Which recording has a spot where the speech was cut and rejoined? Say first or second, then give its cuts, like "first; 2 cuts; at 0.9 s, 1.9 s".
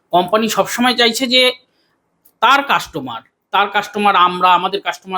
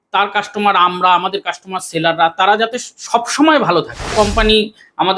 second; 1 cut; at 4.1 s